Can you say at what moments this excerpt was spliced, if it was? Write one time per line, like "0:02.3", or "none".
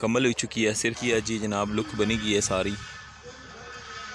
0:01.0